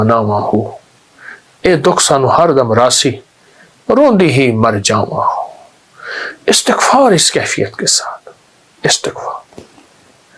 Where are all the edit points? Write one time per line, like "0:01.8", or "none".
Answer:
none